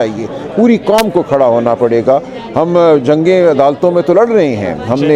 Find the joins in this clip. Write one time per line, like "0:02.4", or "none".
none

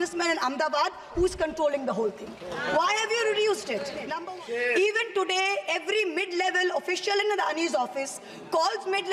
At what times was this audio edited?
0:04.1

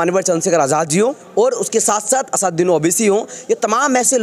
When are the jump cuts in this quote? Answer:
0:01.2

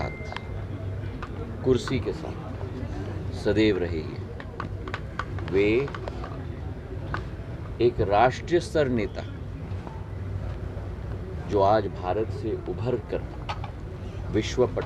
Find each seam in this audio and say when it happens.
none

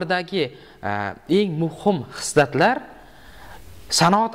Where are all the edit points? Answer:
none

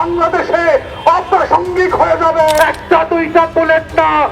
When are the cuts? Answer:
0:02.6

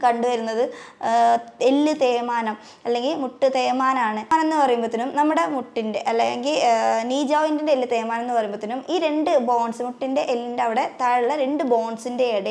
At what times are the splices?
0:04.3

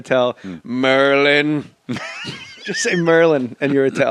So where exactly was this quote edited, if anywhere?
0:02.5

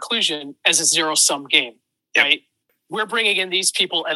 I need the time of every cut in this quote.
0:02.7

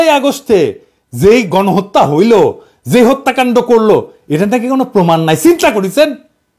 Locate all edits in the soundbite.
none

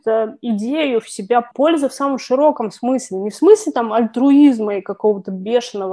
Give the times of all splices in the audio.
0:01.5

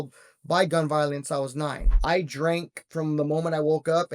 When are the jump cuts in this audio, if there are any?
0:01.9

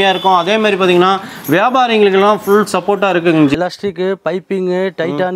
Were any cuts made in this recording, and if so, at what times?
0:03.5

